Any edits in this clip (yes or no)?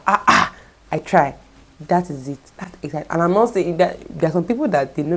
no